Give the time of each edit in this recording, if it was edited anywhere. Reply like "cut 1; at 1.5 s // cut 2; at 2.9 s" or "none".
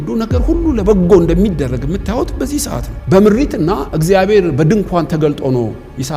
cut 1; at 2.9 s